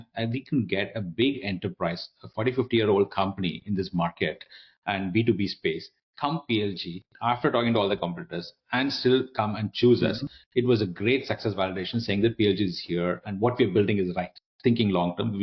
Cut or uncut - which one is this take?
uncut